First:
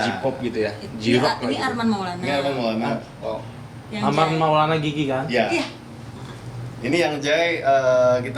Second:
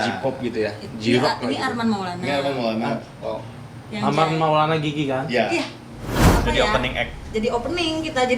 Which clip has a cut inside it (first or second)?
second